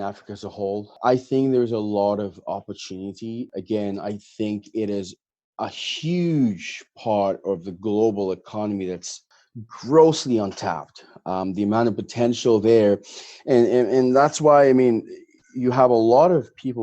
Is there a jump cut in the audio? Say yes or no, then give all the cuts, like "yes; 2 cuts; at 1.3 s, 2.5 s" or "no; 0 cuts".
yes; 2 cuts; at 1.0 s, 3.5 s